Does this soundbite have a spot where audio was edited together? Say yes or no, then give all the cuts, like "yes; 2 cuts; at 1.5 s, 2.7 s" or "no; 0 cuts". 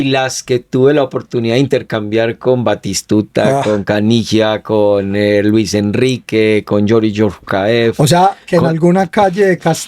no; 0 cuts